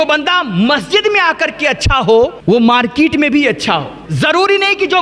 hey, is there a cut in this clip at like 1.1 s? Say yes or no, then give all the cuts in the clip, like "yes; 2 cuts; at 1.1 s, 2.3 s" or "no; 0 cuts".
no; 2 cuts; at 2.4 s, 4.0 s